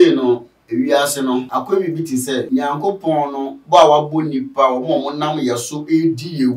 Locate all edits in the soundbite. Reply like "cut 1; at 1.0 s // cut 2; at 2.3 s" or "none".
cut 1; at 1.5 s // cut 2; at 2.5 s

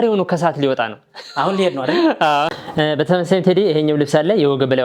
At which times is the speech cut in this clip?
cut 1; at 2.6 s

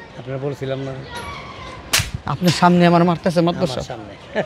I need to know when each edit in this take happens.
none

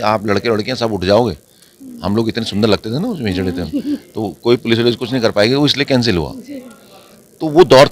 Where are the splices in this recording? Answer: none

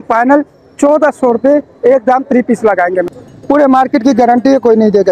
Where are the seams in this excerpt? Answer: cut 1; at 3.1 s

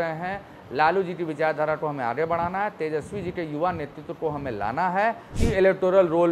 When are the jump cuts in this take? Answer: cut 1; at 5.3 s

